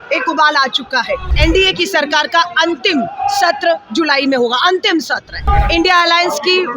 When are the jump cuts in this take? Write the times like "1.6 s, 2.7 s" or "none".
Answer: 1.3 s, 5.4 s